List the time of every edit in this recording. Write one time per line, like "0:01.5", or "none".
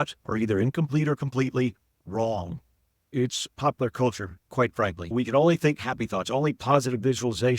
0:03.1